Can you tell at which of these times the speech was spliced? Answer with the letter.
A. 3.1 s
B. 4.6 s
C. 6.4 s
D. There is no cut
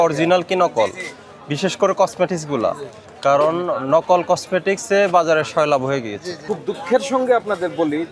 C